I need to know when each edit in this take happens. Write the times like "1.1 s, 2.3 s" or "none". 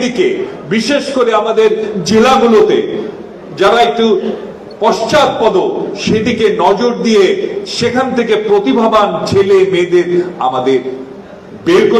none